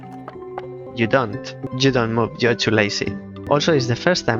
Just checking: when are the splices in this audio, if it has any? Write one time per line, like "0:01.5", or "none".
0:00.9
0:01.6